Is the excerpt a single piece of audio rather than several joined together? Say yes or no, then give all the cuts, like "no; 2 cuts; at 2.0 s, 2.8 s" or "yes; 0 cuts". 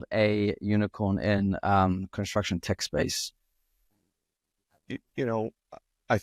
yes; 0 cuts